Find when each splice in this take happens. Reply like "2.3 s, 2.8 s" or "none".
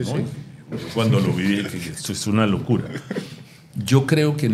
none